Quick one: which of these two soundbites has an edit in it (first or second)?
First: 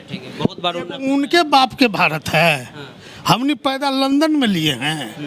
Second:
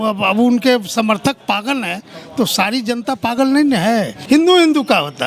second